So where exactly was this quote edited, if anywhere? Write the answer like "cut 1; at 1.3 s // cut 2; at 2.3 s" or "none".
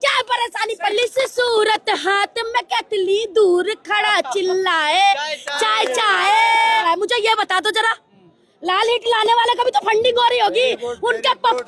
cut 1; at 0.9 s // cut 2; at 6.8 s